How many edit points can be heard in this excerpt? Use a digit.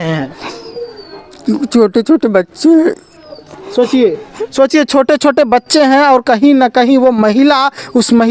0